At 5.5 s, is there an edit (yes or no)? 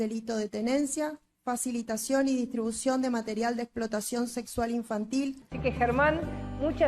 yes